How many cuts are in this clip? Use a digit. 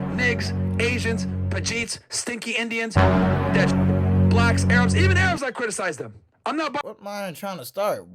1